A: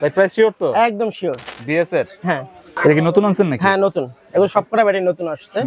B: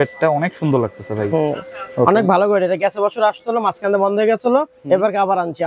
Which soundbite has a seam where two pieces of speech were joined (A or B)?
A